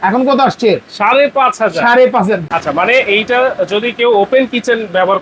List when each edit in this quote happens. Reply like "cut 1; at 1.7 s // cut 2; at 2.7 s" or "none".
cut 1; at 2.4 s